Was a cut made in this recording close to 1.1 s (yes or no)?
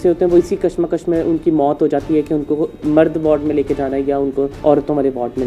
no